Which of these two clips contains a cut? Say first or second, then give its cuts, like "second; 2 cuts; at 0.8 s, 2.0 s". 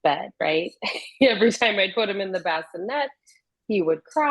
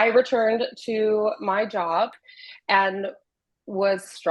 second; 1 cut; at 2.2 s